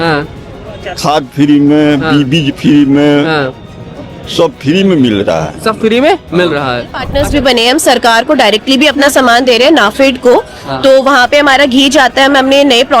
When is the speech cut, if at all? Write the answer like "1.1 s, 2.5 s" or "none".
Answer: 7.1 s